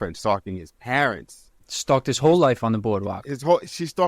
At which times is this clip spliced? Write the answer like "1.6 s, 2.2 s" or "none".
1.6 s